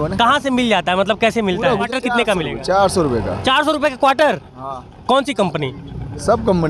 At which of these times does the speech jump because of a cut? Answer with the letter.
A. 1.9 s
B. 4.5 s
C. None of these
A